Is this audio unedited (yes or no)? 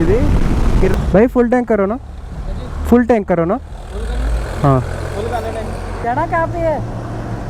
no